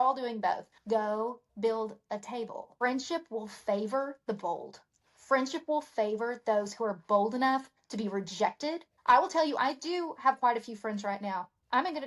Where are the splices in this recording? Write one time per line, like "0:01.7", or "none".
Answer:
0:02.6